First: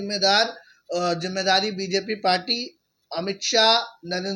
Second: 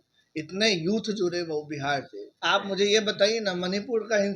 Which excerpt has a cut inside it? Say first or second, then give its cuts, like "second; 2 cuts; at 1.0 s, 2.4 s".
second; 1 cut; at 2.4 s